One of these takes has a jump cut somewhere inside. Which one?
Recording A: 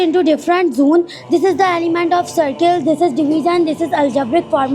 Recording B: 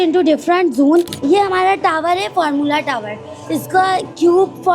B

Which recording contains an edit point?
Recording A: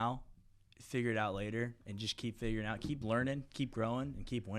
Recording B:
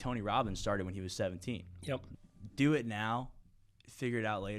B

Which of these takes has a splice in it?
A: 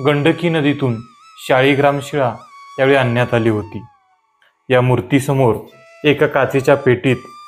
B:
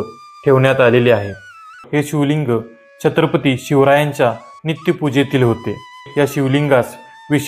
B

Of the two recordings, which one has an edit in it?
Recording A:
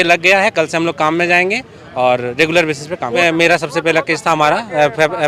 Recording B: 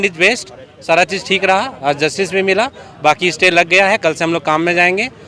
A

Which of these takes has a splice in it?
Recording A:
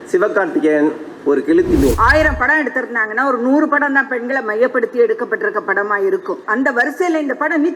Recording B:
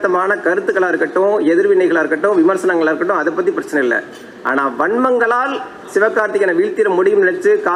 A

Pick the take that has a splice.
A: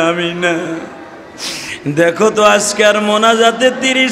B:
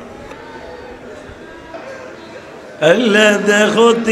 B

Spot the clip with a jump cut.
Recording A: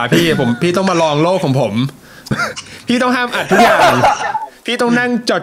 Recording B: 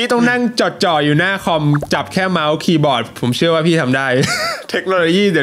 A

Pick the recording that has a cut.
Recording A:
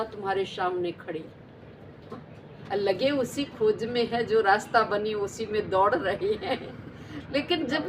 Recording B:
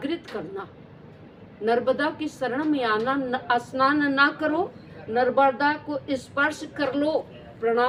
A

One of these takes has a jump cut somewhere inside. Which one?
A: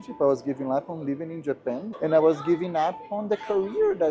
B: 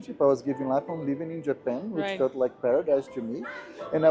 A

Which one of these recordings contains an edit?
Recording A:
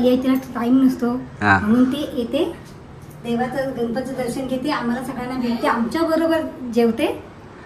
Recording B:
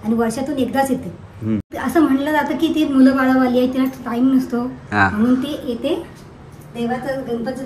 B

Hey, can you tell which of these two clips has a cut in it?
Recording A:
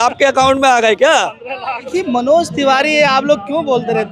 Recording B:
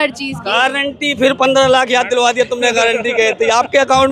A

